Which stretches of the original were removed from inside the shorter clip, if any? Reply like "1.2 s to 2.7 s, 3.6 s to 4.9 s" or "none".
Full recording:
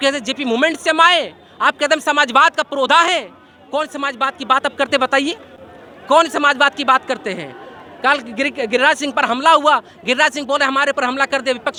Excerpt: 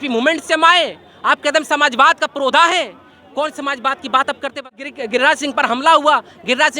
4.9 s to 8.2 s